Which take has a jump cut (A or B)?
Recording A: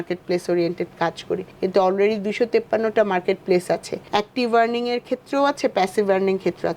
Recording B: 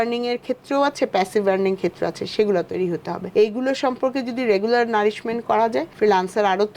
B